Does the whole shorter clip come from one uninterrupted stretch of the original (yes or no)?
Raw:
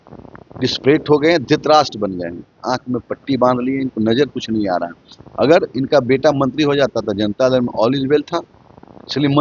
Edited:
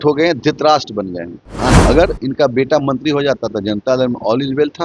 no